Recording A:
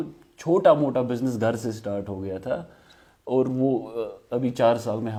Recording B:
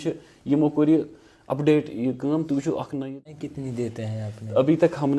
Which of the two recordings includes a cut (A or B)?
B